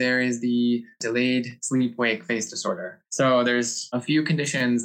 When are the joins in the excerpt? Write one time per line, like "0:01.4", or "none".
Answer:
0:01.1
0:03.0
0:03.8